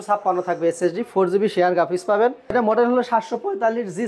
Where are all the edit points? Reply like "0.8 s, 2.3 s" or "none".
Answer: 2.5 s